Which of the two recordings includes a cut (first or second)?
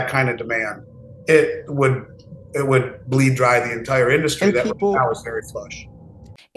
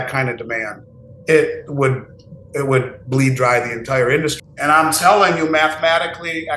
second